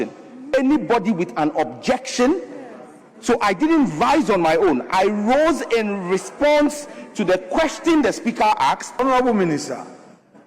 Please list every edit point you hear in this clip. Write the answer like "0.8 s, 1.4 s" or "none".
8.9 s